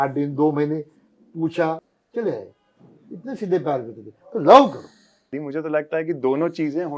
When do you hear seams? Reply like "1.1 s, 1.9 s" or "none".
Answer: 2.0 s, 5.4 s